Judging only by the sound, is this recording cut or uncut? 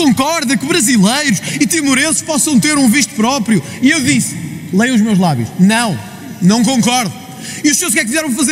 uncut